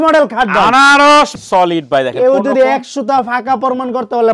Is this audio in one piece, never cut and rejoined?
no; 1 cut; at 1.4 s

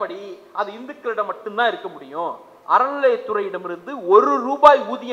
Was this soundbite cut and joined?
no; 0 cuts

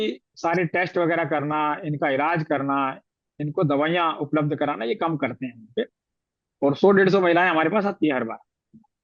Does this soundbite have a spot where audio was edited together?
no; 0 cuts

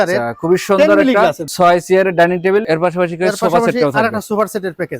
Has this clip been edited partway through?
yes; 2 cuts; at 1.4 s, 2.7 s

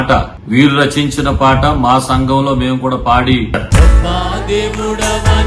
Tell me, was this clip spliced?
yes; 1 cut; at 3.6 s

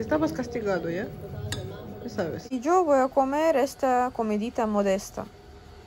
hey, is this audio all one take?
no; 1 cut; at 2.4 s

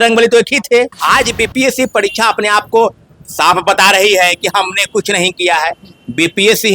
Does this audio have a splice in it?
yes; 1 cut; at 1.0 s

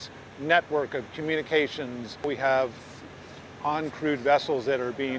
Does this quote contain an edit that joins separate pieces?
yes; 1 cut; at 2.2 s

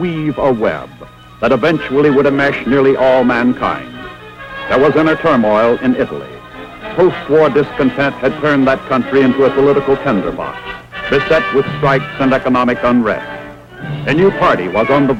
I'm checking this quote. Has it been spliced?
no; 0 cuts

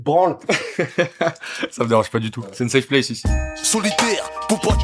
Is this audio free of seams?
no; 2 cuts; at 2.4 s, 3.3 s

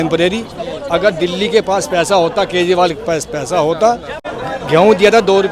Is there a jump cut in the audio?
yes; 1 cut; at 4.2 s

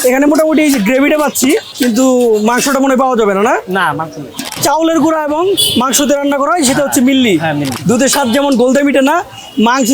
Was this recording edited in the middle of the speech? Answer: yes; 2 cuts; at 4.5 s, 7.7 s

